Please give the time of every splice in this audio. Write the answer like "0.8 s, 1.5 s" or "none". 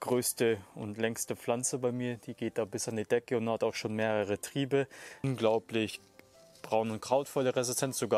5.3 s